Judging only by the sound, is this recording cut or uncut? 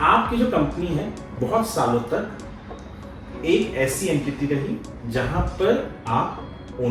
uncut